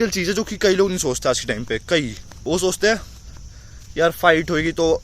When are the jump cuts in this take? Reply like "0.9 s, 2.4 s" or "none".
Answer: 2.2 s